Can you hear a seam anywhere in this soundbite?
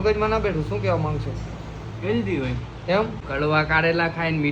yes; 1 cut; at 3.2 s

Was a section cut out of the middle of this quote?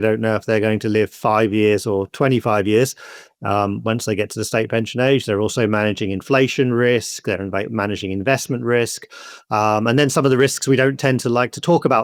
no; 0 cuts

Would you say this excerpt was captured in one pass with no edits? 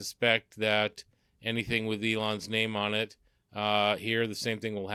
yes; 0 cuts

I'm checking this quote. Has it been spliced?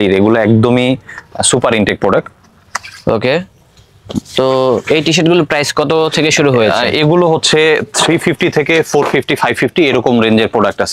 no; 0 cuts

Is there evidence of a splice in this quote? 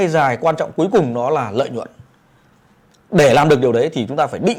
no; 0 cuts

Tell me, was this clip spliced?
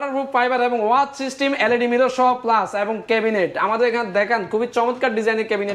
no; 0 cuts

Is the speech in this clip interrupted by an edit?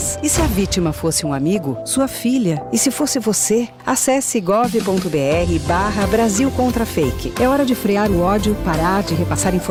no; 0 cuts

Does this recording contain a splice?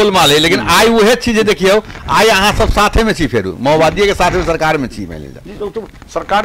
no; 0 cuts

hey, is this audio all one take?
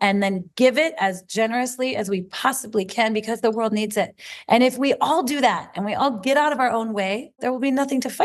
no; 1 cut; at 7.3 s

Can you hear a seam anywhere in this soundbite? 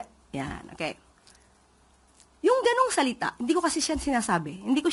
no; 0 cuts

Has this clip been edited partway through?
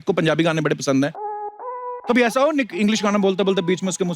yes; 1 cut; at 1.5 s

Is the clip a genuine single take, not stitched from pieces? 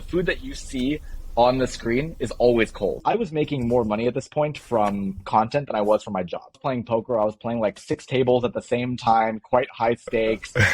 no; 2 cuts; at 3.0 s, 6.6 s

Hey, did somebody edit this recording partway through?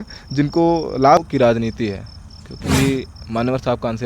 yes; 1 cut; at 1.2 s

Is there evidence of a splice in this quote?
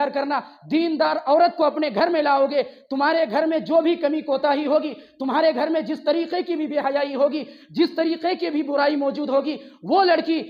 no; 0 cuts

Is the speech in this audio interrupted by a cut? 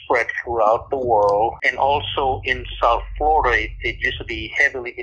yes; 1 cut; at 1.6 s

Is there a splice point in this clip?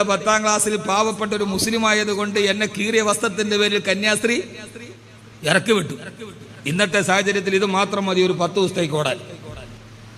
no; 0 cuts

